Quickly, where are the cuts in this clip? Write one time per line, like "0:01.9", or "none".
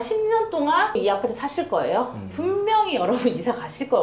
0:01.0